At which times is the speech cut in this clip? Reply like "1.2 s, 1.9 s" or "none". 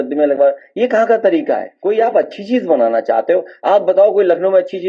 1.7 s